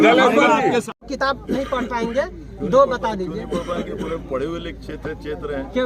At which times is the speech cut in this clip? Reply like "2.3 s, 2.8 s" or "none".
1.1 s